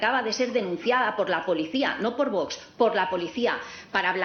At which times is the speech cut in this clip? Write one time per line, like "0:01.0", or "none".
none